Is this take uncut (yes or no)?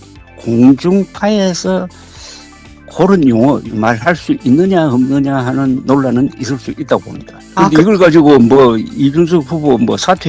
no